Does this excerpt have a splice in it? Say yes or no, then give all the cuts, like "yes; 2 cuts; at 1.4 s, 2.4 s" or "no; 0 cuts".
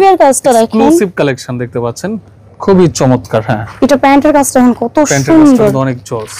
no; 0 cuts